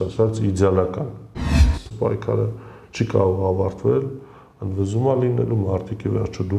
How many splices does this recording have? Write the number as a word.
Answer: one